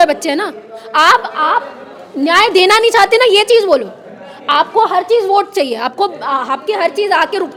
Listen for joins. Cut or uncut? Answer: uncut